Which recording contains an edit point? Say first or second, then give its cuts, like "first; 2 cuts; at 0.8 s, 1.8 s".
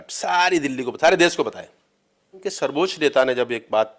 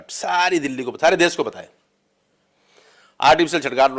first; 1 cut; at 2.5 s